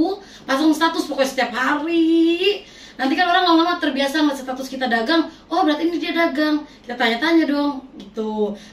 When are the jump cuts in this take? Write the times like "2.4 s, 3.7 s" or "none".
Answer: none

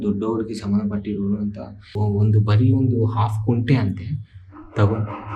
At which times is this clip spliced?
1.9 s

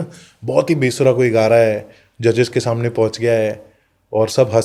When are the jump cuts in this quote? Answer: none

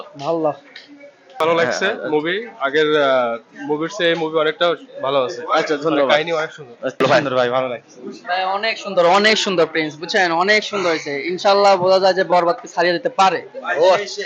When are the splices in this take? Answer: 1.4 s, 7.0 s

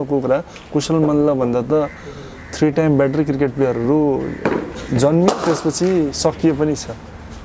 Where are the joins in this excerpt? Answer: none

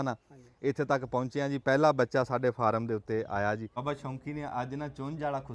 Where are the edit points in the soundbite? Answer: 3.7 s

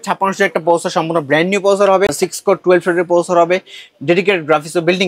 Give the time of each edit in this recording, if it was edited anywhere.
2.1 s

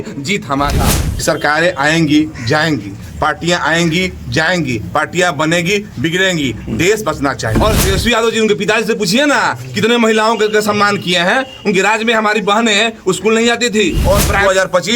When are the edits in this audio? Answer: 1.1 s, 7.5 s, 14.0 s

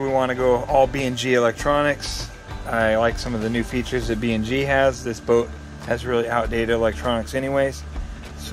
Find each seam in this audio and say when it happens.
none

